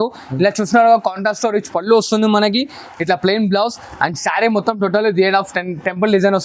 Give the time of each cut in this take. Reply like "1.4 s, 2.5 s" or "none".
none